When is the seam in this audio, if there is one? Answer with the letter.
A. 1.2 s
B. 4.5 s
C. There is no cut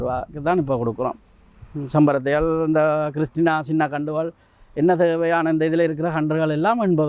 C